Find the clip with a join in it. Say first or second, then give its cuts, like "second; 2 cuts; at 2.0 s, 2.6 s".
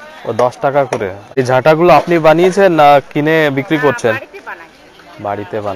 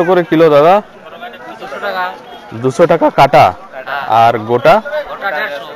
first; 1 cut; at 1.3 s